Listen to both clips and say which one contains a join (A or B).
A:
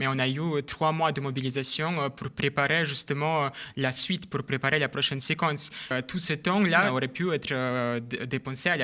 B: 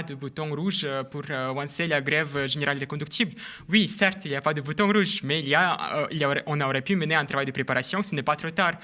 A